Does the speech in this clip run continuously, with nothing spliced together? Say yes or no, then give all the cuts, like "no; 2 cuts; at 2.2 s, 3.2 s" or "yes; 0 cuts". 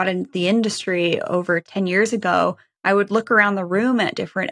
no; 1 cut; at 1.7 s